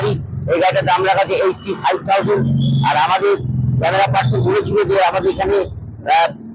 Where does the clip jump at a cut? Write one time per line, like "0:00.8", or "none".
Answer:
none